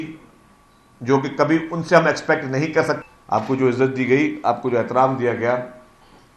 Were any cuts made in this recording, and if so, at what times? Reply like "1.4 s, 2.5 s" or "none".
3.0 s